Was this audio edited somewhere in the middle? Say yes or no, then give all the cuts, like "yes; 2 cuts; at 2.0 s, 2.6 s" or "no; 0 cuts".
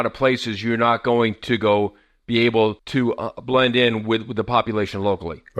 yes; 1 cut; at 2.8 s